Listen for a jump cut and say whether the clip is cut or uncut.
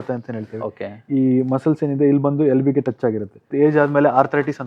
cut